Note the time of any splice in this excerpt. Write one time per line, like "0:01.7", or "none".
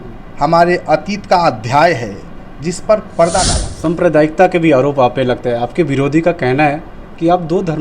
0:03.6